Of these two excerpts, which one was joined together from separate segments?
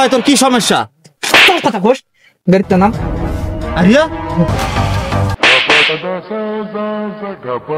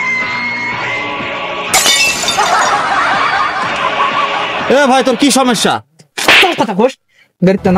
first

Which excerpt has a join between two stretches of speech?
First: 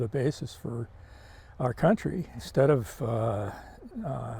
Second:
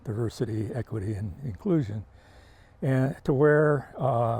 first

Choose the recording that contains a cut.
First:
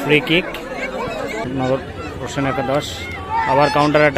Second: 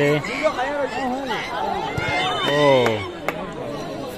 first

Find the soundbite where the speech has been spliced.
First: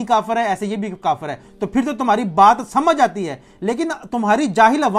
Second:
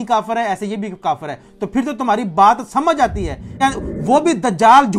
second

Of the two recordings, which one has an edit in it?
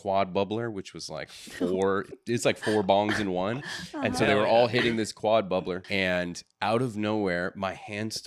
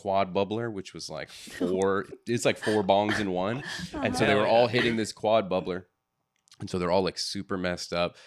first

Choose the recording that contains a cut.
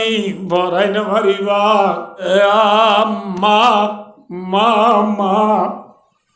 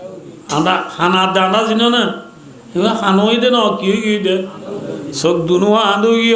first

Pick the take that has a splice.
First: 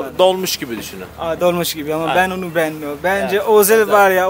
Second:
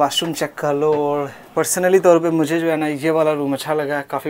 second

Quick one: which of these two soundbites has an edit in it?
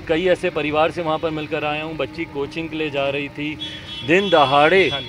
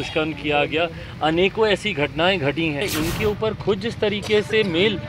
second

